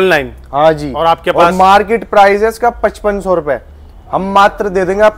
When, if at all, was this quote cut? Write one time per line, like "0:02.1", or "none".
none